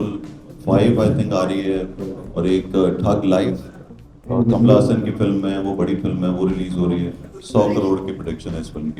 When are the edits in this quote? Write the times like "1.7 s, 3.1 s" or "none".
7.3 s